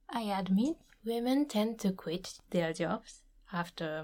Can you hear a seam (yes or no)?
yes